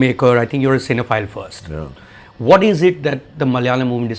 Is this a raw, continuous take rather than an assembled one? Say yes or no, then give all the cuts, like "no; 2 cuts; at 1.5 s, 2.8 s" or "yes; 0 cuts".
yes; 0 cuts